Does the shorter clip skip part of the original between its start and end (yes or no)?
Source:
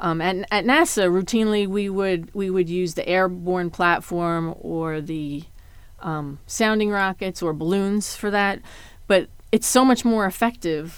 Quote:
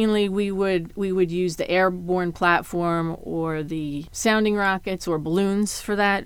yes